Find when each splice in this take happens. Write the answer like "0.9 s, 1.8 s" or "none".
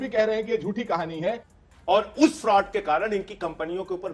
1.5 s